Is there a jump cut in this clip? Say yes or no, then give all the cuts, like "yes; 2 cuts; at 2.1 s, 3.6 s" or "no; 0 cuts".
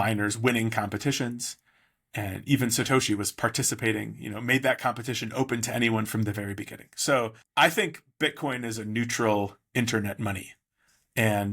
yes; 1 cut; at 7.4 s